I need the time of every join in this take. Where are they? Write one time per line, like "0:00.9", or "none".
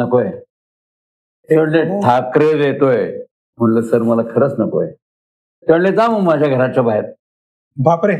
none